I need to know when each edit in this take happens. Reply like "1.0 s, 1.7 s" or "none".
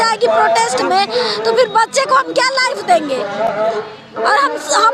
none

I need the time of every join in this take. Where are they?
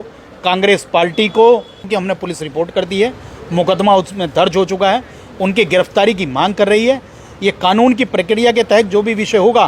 1.9 s

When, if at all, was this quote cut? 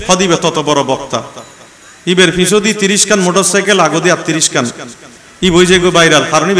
none

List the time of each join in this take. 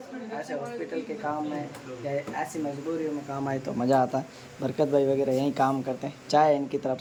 none

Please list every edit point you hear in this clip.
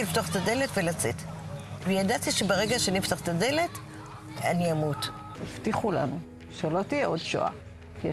5.3 s

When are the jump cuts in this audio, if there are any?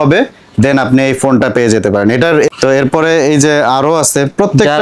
2.6 s

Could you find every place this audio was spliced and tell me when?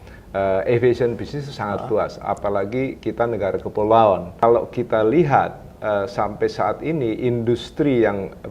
4.4 s

